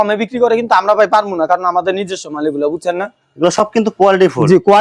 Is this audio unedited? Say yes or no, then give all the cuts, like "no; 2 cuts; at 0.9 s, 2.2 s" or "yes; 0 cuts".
yes; 0 cuts